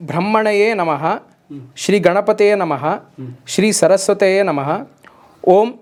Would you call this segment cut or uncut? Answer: uncut